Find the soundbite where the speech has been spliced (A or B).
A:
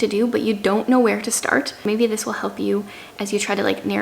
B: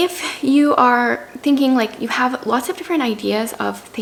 A